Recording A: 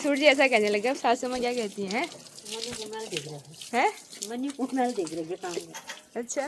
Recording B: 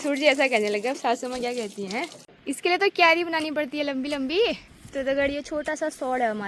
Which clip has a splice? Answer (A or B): B